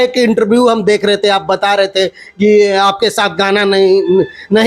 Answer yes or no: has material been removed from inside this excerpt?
no